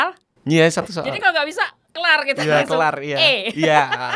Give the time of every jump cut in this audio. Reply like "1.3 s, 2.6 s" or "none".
none